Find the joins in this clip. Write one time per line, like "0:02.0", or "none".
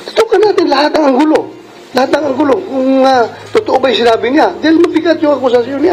none